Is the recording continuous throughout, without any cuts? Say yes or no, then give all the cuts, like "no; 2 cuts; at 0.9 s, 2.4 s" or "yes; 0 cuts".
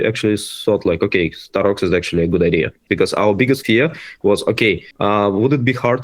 no; 3 cuts; at 2.8 s, 3.6 s, 4.9 s